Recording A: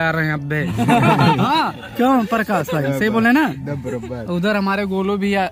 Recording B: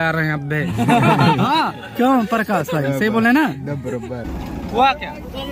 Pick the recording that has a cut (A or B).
B